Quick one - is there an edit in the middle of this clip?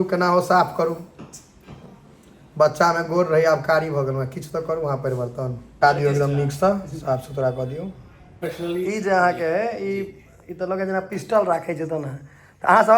yes; 2 cuts; at 5.6 s, 8.5 s

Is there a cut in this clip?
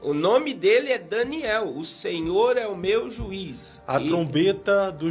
no; 0 cuts

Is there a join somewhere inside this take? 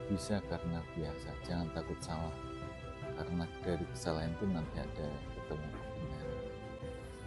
no; 0 cuts

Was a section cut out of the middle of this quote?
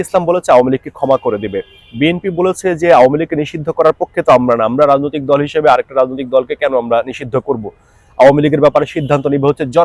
no; 0 cuts

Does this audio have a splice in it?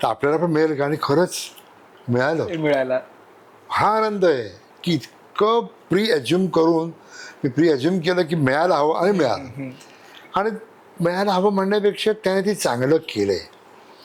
no; 0 cuts

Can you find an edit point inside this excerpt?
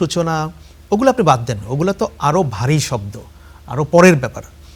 no; 0 cuts

